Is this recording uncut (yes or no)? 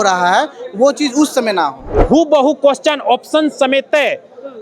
no